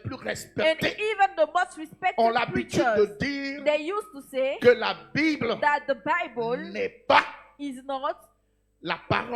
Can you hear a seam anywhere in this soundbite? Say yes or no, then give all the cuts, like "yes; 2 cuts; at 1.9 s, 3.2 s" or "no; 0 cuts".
no; 0 cuts